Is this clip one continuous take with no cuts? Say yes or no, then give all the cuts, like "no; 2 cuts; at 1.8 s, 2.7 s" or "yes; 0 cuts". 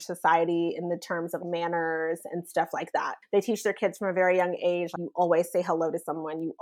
yes; 0 cuts